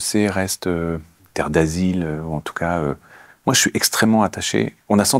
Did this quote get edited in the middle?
yes; 1 cut; at 1.2 s

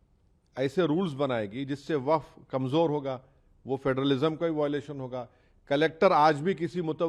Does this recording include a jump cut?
no; 0 cuts

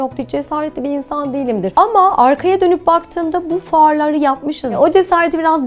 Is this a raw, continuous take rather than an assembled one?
no; 2 cuts; at 1.7 s, 4.6 s

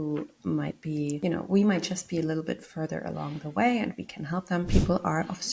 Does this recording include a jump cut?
yes; 2 cuts; at 1.2 s, 4.7 s

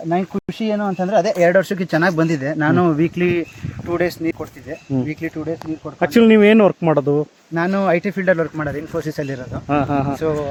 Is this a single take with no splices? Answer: yes; 0 cuts

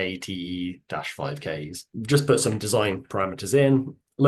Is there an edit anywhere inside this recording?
yes; 1 cut; at 1.8 s

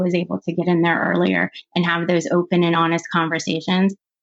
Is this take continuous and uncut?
yes; 0 cuts

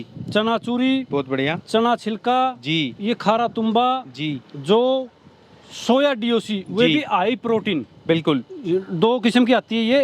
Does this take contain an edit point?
no; 0 cuts

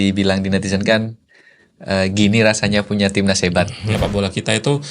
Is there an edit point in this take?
yes; 1 cut; at 3.9 s

